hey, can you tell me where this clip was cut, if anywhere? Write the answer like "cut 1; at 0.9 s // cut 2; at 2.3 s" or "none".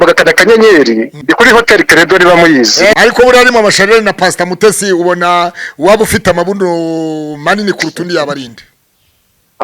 cut 1; at 1.1 s // cut 2; at 2.9 s